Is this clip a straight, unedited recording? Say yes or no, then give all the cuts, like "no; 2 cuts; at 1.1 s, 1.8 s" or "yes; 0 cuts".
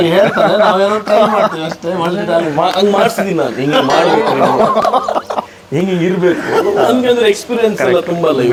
yes; 0 cuts